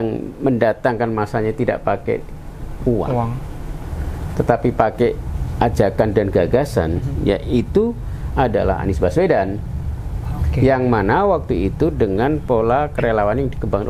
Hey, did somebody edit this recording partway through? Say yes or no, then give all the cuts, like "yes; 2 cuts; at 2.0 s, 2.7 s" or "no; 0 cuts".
no; 0 cuts